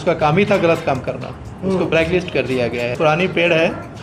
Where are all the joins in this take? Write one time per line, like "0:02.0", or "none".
0:03.0